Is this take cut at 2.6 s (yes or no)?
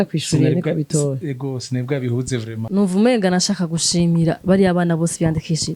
yes